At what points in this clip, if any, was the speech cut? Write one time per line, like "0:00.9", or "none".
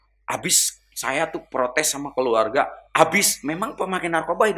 none